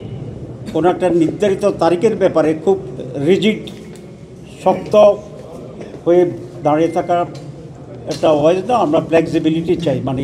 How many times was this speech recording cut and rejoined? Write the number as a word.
zero